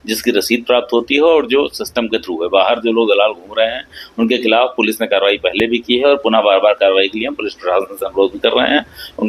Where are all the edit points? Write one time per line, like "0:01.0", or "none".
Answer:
none